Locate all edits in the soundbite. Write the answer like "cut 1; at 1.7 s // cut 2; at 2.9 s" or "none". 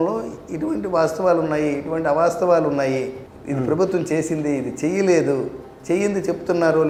none